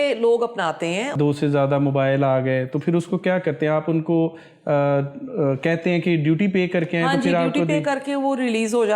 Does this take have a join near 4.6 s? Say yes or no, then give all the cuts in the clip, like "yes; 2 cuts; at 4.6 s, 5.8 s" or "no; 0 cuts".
no; 1 cut; at 1.1 s